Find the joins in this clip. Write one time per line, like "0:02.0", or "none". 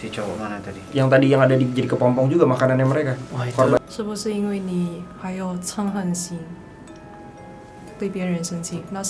0:03.8